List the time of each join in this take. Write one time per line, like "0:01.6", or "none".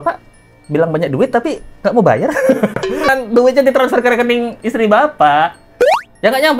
0:03.1